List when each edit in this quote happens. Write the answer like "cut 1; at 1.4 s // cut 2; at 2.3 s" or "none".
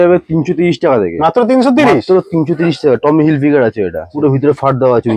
cut 1; at 4.1 s